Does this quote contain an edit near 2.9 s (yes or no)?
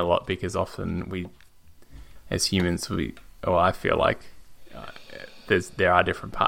no